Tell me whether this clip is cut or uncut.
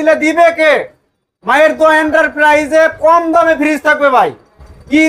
uncut